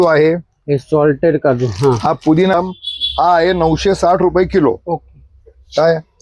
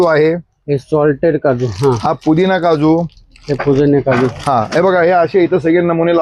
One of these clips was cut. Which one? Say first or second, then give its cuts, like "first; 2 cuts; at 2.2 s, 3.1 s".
first; 1 cut; at 2.5 s